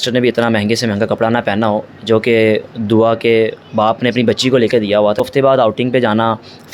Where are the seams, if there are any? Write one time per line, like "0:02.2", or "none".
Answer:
0:05.2